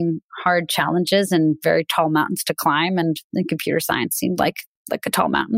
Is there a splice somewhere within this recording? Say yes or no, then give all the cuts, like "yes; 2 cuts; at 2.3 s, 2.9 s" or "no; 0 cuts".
no; 0 cuts